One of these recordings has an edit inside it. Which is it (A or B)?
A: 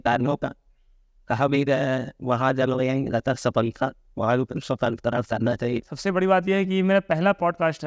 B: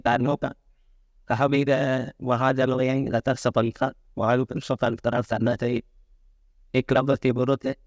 A